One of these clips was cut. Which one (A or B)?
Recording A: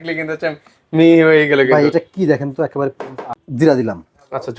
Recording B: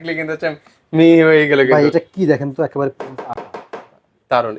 A